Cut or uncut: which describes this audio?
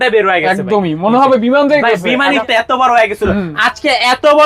cut